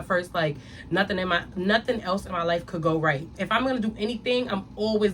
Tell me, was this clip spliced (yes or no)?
yes